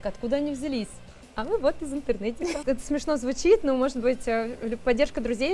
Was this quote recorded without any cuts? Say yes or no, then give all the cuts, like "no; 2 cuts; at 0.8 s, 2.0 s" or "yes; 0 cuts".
no; 1 cut; at 2.6 s